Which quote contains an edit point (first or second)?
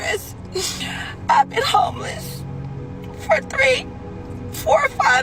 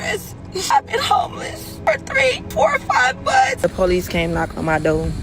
second